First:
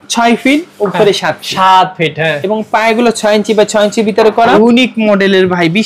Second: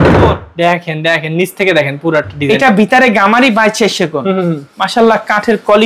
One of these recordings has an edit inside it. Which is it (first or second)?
first